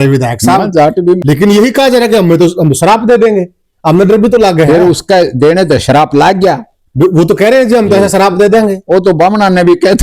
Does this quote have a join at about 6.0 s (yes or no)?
no